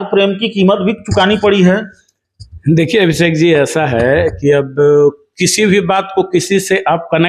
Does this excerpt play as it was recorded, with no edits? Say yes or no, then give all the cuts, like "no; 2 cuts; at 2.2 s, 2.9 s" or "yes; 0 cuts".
yes; 0 cuts